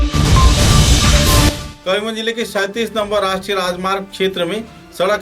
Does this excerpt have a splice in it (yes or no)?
yes